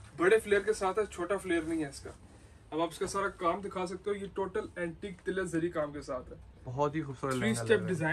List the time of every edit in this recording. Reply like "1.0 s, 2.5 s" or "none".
none